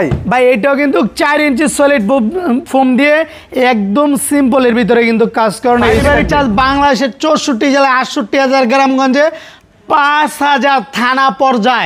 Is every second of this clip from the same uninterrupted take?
no; 1 cut; at 6.0 s

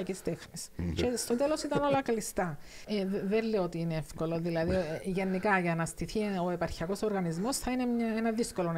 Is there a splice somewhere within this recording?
yes; 1 cut; at 2.8 s

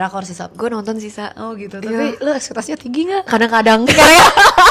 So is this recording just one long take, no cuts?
yes; 0 cuts

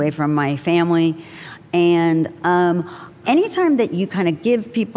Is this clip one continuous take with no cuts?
no; 1 cut; at 3.2 s

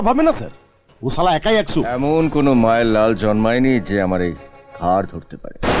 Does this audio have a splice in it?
yes; 1 cut; at 1.9 s

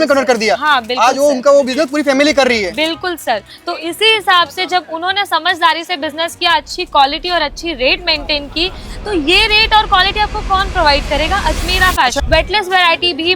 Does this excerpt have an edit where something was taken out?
yes; 1 cut; at 12.2 s

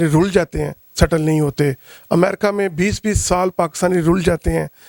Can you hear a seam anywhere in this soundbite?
no; 0 cuts

